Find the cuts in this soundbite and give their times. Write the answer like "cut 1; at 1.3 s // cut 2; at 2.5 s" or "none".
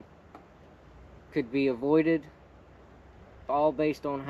none